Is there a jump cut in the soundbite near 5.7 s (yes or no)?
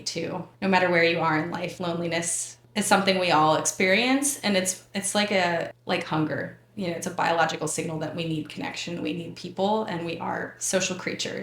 yes